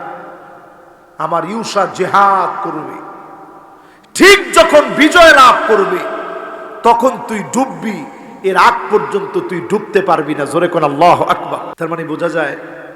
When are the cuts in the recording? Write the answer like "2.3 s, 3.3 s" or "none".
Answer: 11.7 s